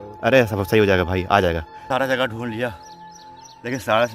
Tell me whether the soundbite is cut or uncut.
cut